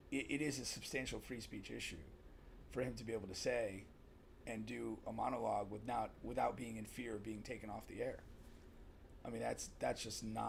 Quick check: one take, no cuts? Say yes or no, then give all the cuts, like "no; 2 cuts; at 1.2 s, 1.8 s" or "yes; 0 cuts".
yes; 0 cuts